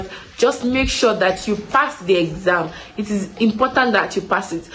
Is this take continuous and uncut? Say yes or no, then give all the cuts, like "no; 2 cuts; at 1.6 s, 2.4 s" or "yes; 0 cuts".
yes; 0 cuts